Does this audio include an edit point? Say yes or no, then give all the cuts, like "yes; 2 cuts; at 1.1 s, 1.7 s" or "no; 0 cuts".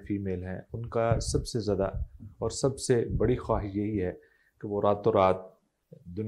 no; 0 cuts